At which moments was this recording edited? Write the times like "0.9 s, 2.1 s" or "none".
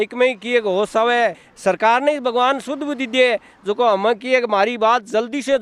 1.4 s